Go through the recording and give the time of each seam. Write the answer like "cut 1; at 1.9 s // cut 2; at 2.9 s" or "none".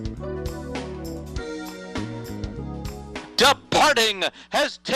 cut 1; at 3.2 s